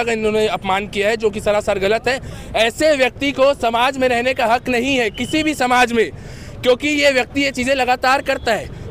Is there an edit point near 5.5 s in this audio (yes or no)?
no